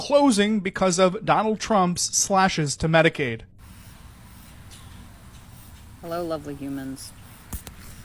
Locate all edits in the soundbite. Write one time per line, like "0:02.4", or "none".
0:03.5